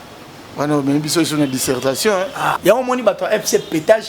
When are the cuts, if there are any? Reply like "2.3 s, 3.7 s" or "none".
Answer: 2.6 s